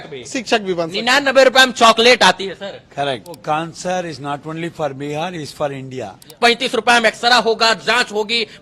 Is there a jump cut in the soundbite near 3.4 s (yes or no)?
yes